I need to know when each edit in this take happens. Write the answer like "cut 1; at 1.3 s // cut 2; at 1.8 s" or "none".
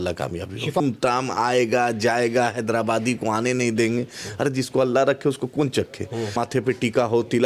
cut 1; at 0.8 s // cut 2; at 6.3 s